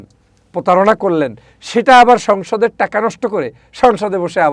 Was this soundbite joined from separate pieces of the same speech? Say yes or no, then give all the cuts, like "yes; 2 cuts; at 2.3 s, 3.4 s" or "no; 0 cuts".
no; 0 cuts